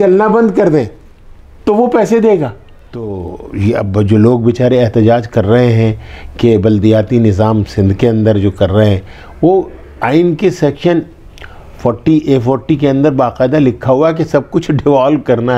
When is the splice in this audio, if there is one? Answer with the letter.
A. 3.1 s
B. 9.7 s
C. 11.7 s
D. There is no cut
A